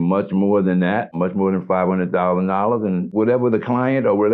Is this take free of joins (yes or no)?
no